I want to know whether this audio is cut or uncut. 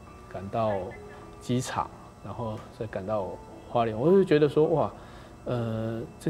uncut